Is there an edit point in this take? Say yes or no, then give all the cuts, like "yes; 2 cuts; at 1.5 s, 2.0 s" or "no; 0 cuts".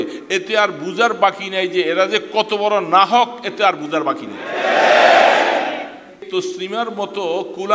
yes; 1 cut; at 6.2 s